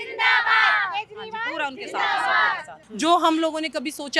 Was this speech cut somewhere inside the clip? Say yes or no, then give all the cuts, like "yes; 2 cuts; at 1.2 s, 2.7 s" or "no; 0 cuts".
yes; 1 cut; at 2.6 s